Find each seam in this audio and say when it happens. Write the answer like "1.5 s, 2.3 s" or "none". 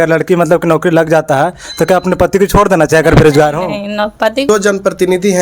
4.4 s